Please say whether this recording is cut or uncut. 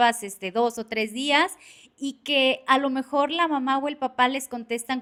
uncut